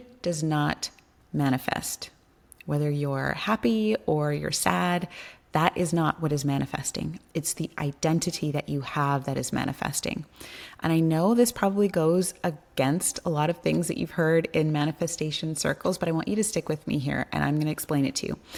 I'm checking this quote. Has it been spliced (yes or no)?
no